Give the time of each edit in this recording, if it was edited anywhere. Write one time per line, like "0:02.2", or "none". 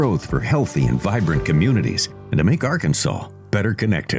none